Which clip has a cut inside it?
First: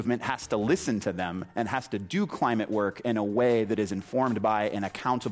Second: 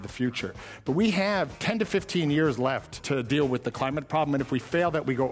second; 2 cuts; at 1.6 s, 3.0 s

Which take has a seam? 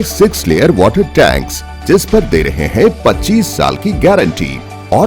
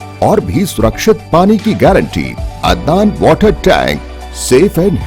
second; 1 cut; at 2.5 s

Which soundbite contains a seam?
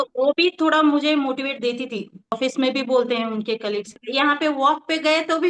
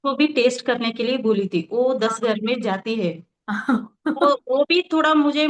first; 2 cuts; at 2.4 s, 4.0 s

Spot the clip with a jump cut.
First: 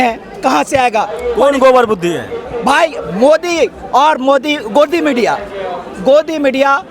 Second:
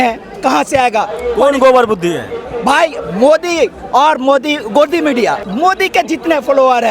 second; 1 cut; at 5.5 s

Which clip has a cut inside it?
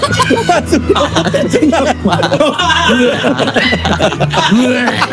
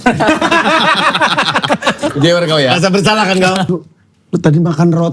second; 1 cut; at 3.7 s

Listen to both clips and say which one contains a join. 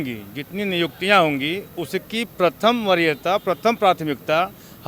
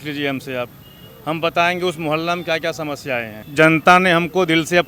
second; 1 cut; at 3.4 s

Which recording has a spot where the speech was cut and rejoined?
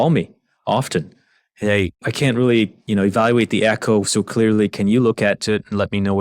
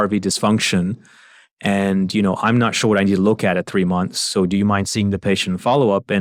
first; 1 cut; at 2.0 s

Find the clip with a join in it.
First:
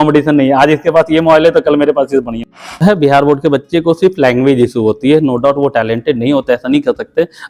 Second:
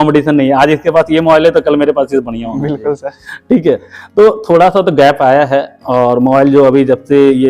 first; 1 cut; at 2.7 s

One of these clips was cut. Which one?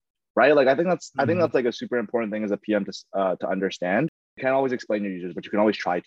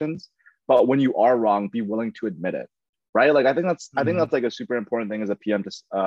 first; 1 cut; at 4.3 s

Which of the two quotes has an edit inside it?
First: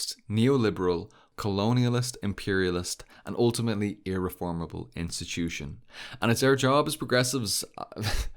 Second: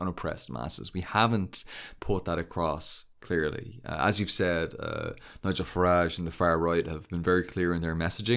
first; 1 cut; at 1.2 s

